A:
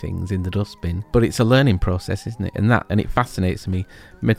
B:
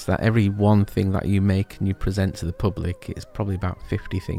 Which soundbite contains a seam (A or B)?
A